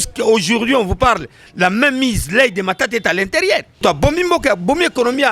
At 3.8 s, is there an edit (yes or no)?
yes